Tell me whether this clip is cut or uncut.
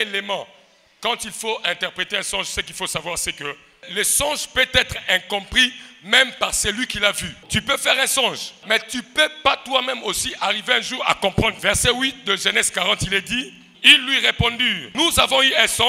cut